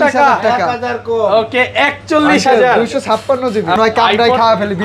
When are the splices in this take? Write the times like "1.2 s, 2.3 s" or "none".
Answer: 3.8 s